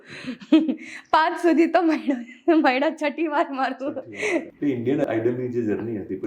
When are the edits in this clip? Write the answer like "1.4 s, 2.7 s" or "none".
4.5 s